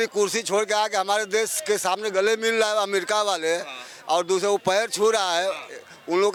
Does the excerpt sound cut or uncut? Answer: uncut